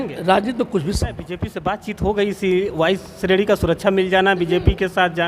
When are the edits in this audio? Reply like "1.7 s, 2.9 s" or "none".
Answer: 1.5 s